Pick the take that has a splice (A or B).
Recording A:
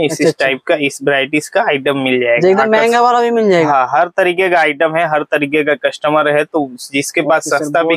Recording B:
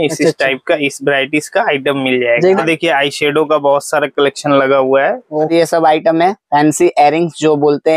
B